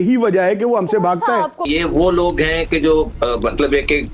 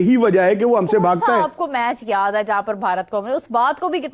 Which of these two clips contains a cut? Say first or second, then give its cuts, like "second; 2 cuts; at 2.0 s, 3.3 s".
first; 1 cut; at 1.7 s